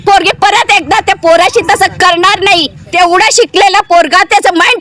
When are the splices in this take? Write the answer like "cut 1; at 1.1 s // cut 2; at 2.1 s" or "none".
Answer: cut 1; at 2.8 s